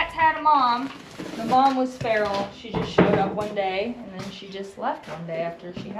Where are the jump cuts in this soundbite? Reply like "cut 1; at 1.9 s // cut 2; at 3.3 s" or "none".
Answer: none